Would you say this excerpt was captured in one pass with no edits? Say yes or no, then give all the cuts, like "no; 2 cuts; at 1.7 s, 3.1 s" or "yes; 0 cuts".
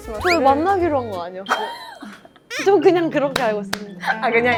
yes; 0 cuts